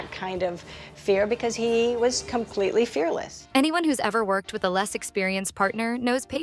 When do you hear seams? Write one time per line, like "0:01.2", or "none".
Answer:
none